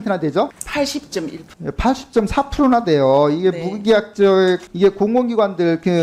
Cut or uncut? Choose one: uncut